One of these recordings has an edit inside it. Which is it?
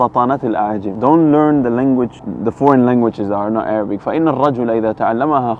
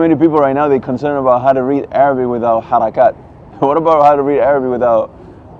first; 2 cuts; at 0.9 s, 2.2 s

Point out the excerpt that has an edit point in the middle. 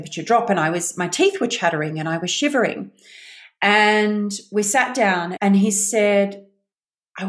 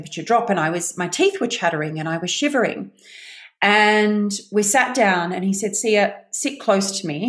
first; 1 cut; at 5.3 s

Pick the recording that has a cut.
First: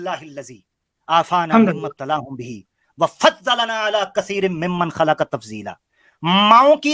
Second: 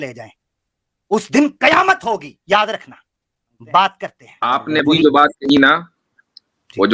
second; 1 cut; at 4.4 s

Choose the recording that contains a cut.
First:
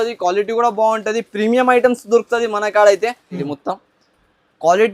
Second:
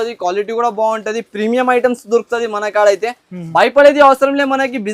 first; 1 cut; at 3.4 s

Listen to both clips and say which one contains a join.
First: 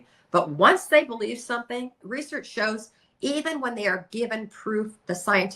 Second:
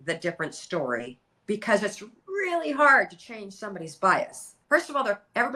first; 1 cut; at 2.0 s

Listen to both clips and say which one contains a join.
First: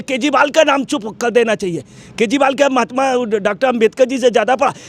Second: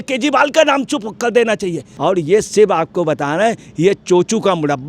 second; 1 cut; at 1.9 s

